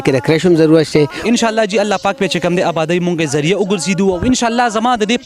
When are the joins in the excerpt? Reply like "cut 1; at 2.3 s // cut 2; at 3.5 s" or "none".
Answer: cut 1; at 1.2 s

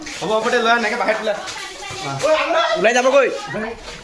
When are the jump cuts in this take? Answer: none

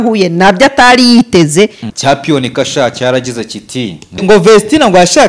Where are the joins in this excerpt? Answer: cut 1; at 1.9 s // cut 2; at 4.2 s

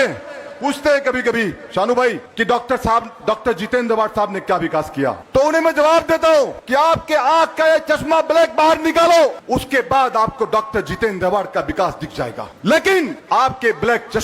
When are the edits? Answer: cut 1; at 2.2 s // cut 2; at 5.2 s // cut 3; at 6.6 s // cut 4; at 9.4 s // cut 5; at 12.5 s // cut 6; at 13.2 s

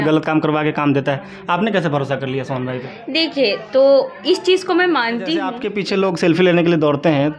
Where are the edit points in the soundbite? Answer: cut 1; at 5.7 s

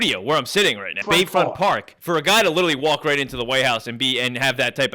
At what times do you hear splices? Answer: cut 1; at 1.0 s // cut 2; at 1.9 s

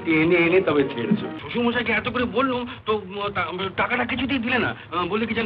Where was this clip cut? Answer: cut 1; at 1.4 s

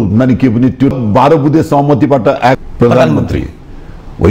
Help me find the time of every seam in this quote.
cut 1; at 0.9 s // cut 2; at 2.6 s

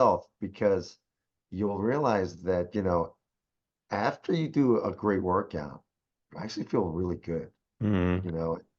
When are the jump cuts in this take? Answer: none

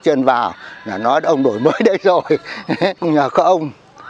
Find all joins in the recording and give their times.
cut 1; at 3.0 s

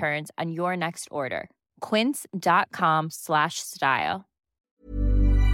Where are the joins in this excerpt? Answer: cut 1; at 4.5 s

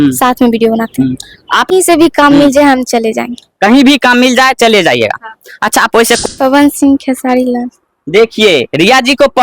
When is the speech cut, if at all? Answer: cut 1; at 1.7 s // cut 2; at 6.2 s

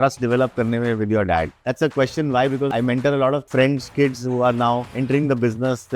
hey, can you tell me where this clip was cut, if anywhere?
cut 1; at 1.6 s // cut 2; at 2.7 s // cut 3; at 3.5 s // cut 4; at 4.9 s

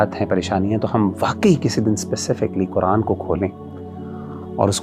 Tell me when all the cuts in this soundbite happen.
none

